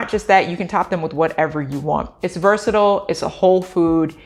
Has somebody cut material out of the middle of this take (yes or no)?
no